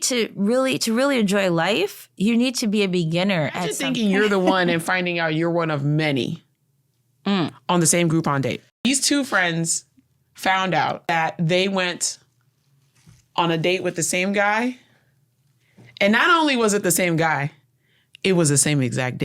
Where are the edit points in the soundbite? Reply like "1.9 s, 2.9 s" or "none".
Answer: 3.8 s, 8.8 s, 11.1 s